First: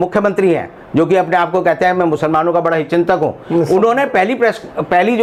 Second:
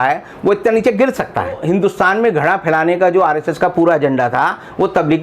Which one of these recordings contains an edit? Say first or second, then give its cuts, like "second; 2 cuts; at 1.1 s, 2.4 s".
second; 1 cut; at 1.6 s